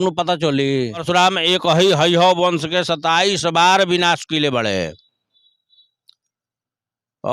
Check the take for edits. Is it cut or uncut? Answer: cut